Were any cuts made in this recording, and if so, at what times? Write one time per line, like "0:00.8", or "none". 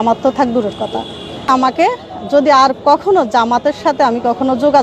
0:01.4